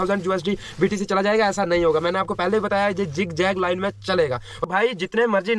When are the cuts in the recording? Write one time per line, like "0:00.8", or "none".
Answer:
0:04.6